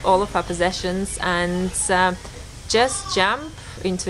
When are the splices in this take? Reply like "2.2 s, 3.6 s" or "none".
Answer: none